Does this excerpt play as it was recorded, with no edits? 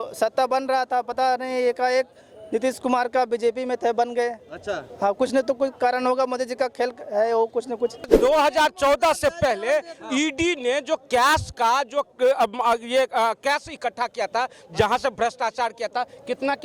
no; 1 cut; at 8.1 s

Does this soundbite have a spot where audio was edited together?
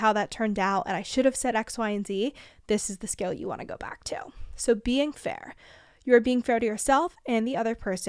no; 0 cuts

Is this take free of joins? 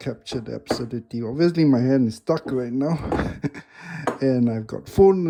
yes; 0 cuts

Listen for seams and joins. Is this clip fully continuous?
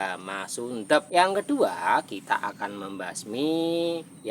no; 1 cut; at 1.1 s

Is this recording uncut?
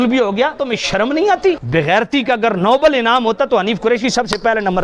no; 1 cut; at 1.6 s

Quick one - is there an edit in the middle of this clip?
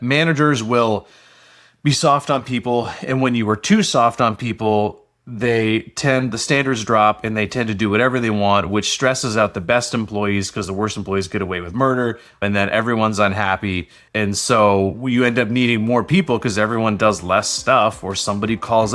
yes; 1 cut; at 12.4 s

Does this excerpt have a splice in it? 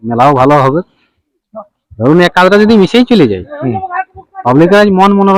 no; 0 cuts

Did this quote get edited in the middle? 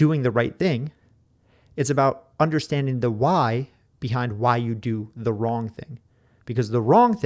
no; 0 cuts

